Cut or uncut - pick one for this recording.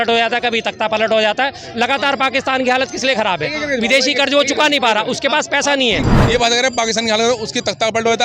cut